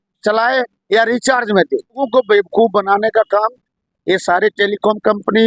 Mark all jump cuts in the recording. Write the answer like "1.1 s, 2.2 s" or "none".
2.0 s